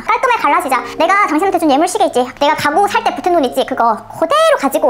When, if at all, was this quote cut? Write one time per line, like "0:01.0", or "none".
0:00.9
0:02.3